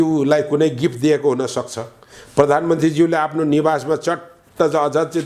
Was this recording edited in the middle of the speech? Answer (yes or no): no